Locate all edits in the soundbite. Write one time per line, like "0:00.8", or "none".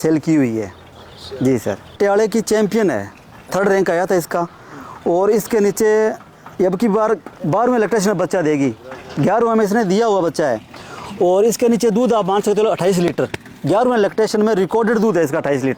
0:02.0